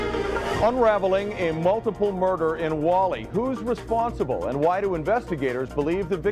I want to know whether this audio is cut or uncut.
uncut